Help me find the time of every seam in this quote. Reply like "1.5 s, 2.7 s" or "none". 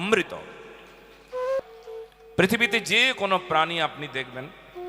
1.6 s

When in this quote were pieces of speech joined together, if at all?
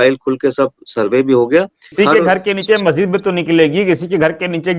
1.9 s

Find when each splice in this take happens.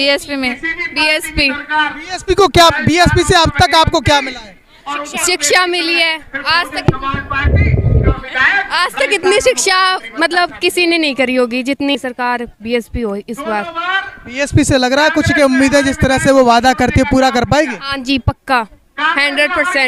none

